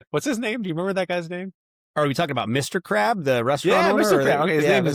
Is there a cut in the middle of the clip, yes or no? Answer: no